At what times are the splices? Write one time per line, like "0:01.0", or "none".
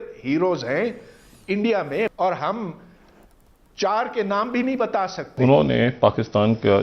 0:02.1
0:05.2